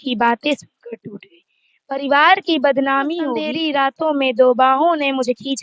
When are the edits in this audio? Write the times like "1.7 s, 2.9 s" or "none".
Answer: 3.5 s